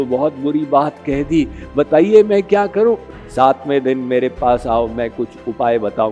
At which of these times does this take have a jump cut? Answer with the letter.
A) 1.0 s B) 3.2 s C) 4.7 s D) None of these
B